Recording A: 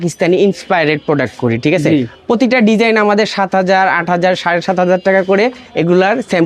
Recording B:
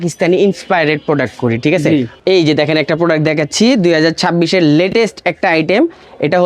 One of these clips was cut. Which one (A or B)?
B